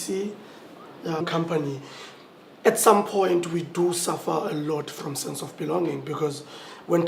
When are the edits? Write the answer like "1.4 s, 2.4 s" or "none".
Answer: none